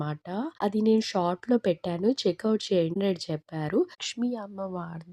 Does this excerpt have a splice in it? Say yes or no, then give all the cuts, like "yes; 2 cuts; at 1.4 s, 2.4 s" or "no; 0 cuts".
yes; 1 cut; at 3.0 s